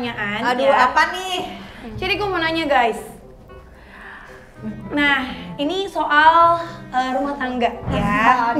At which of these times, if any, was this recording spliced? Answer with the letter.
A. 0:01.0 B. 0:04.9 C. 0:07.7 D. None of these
C